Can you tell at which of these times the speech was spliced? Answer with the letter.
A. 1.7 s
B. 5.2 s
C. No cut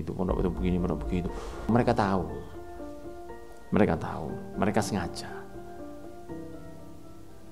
A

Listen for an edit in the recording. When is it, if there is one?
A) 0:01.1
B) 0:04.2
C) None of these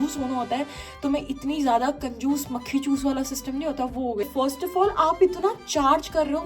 B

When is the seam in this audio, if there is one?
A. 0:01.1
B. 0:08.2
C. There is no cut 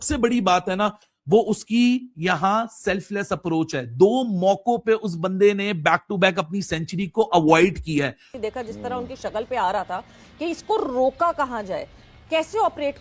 B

